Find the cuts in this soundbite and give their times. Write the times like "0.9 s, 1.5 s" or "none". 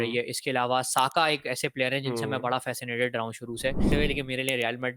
3.9 s